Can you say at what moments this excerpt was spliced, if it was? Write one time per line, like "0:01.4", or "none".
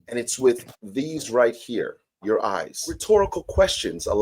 0:03.0